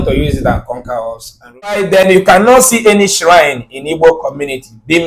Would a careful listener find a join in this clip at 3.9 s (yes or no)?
no